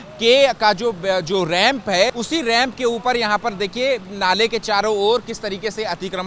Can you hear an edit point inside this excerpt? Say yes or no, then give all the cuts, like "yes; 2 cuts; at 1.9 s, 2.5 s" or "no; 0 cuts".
yes; 1 cut; at 2.1 s